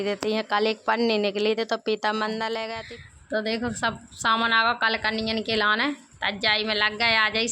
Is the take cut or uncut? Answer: cut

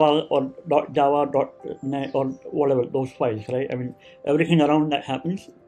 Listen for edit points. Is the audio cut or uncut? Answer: uncut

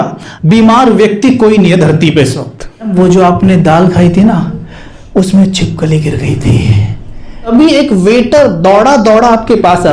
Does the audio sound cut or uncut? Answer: cut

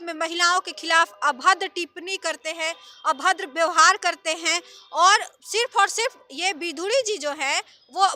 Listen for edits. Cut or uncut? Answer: uncut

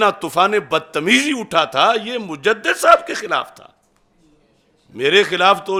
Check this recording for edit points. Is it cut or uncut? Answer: uncut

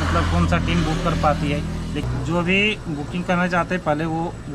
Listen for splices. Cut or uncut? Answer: cut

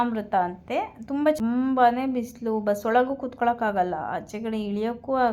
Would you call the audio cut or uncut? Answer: cut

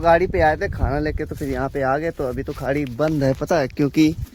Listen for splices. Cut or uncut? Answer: uncut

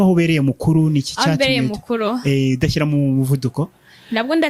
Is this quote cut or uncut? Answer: uncut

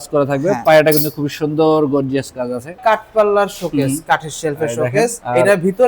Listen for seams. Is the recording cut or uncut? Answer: cut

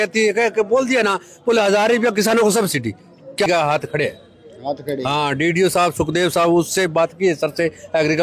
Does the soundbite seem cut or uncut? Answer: cut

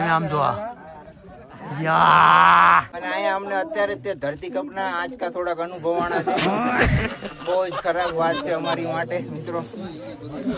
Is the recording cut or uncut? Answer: cut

